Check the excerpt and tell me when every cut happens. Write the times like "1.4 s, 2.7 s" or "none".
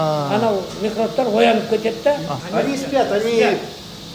2.3 s